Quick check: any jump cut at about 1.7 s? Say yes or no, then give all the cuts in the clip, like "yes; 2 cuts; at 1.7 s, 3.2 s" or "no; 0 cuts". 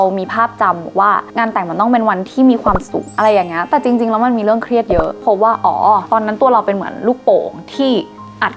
no; 1 cut; at 5.1 s